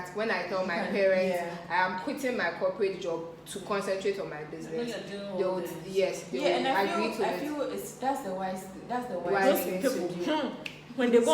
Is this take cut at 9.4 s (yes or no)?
yes